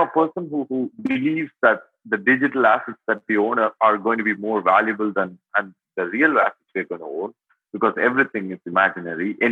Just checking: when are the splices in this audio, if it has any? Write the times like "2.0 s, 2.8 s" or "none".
0.9 s

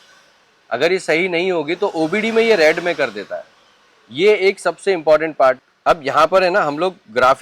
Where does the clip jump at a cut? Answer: 5.6 s

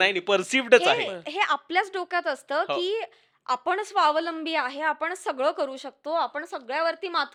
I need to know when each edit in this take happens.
none

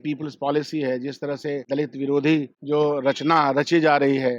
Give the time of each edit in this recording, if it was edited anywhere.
1.6 s, 2.5 s

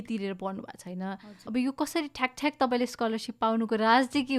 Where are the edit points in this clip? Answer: 1.3 s

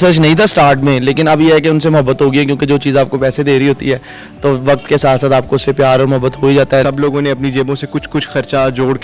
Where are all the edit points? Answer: 6.8 s

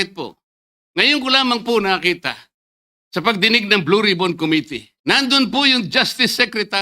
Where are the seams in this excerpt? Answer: 4.8 s

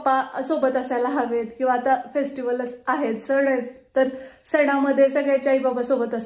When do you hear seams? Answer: none

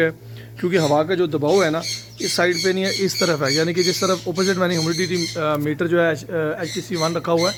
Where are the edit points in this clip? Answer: none

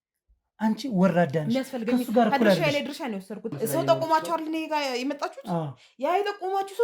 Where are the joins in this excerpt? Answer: 3.5 s

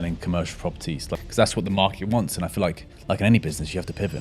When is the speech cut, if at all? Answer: 1.3 s, 2.9 s

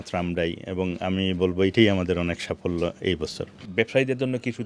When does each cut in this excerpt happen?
3.6 s

